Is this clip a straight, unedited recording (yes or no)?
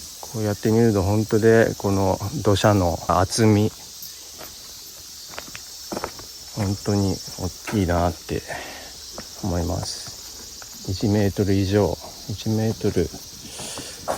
no